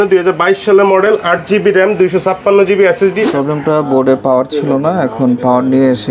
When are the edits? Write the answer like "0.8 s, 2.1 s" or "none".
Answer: 3.2 s